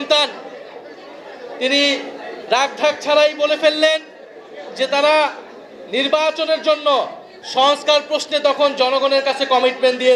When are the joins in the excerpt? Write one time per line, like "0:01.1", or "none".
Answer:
none